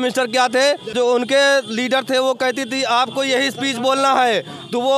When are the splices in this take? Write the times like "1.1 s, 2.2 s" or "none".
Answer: 0.9 s